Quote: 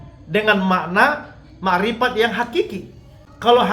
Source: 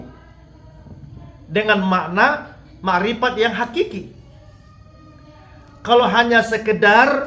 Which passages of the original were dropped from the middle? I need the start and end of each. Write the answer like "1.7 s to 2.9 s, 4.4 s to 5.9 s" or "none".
3.9 s to 5.2 s

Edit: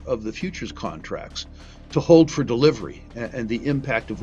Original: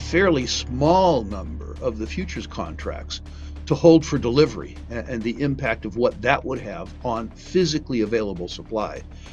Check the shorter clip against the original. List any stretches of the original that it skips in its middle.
none

